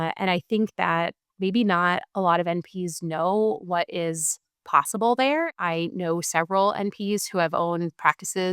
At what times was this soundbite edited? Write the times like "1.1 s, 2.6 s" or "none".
5.5 s